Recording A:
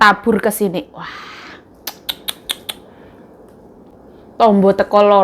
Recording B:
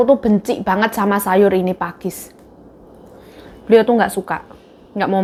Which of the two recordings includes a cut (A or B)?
A